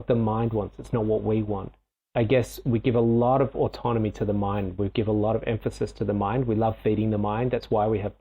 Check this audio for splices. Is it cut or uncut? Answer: cut